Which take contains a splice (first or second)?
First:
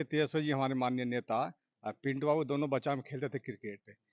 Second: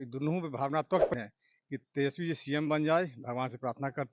second